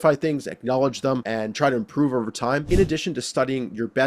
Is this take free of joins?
no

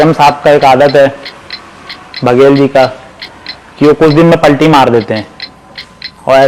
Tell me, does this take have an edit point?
no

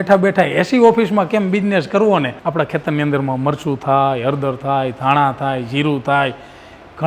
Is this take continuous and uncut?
no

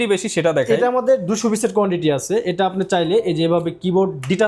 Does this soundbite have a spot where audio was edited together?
no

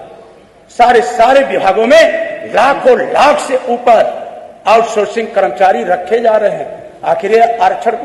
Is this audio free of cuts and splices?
yes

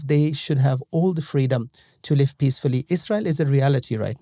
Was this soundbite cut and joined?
no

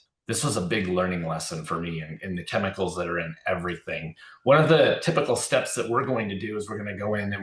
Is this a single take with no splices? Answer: yes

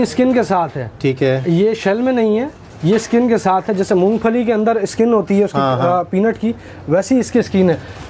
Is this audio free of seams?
yes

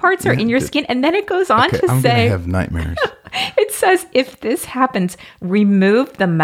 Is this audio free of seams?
yes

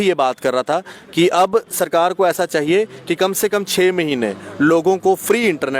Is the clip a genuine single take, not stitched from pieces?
yes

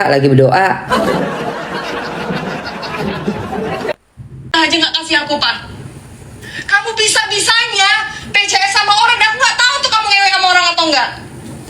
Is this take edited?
yes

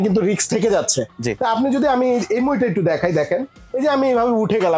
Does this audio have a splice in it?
no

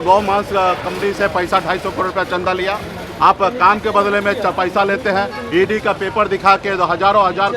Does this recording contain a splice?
no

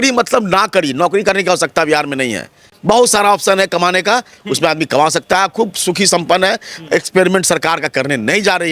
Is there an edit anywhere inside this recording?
no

